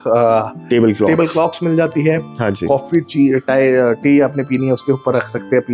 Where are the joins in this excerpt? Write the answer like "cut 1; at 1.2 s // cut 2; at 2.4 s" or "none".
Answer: none